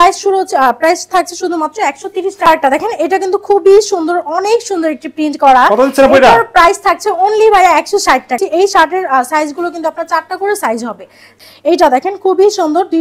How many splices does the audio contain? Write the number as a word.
three